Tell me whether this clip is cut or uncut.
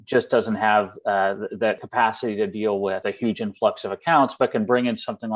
cut